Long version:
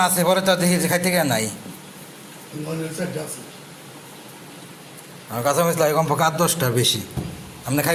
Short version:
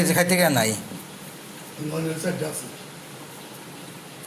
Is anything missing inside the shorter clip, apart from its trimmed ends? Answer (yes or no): no